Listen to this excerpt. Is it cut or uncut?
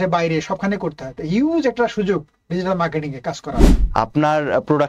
cut